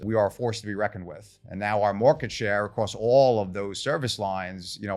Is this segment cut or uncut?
uncut